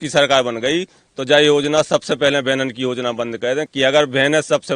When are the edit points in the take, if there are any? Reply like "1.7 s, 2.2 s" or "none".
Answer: 3.7 s